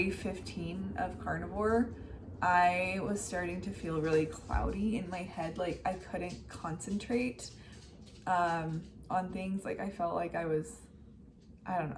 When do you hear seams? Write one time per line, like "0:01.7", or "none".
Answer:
none